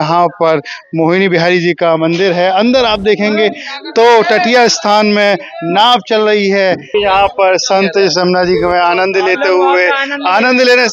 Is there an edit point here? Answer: yes; 1 cut; at 6.8 s

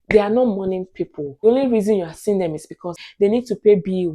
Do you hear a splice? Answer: yes; 2 cuts; at 1.4 s, 2.9 s

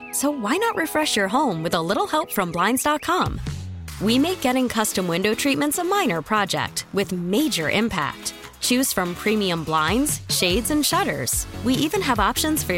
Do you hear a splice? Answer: no; 0 cuts

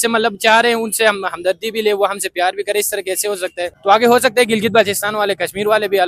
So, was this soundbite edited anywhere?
yes; 1 cut; at 3.7 s

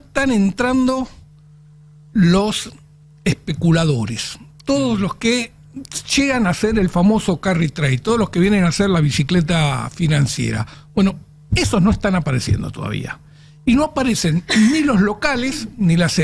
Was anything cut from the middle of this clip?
yes; 1 cut; at 10.7 s

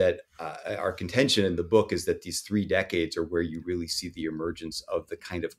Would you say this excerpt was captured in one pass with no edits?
yes; 0 cuts

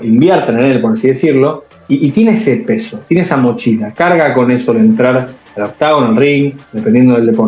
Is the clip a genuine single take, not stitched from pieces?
yes; 0 cuts

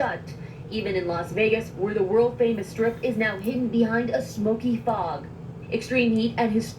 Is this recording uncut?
no; 1 cut; at 2.7 s

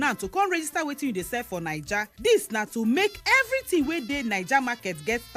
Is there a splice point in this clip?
no; 0 cuts

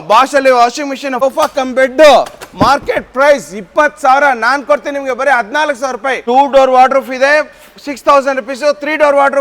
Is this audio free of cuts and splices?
no; 2 cuts; at 1.1 s, 6.2 s

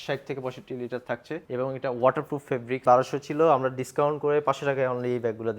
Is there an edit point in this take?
yes; 2 cuts; at 1.4 s, 2.8 s

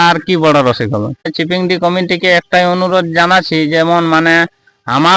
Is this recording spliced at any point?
yes; 1 cut; at 1.3 s

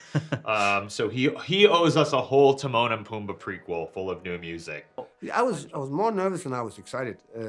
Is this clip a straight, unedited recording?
no; 1 cut; at 5.0 s

